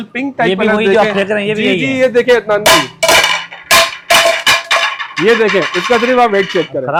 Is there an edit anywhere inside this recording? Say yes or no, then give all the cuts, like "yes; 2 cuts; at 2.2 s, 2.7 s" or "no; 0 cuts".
no; 0 cuts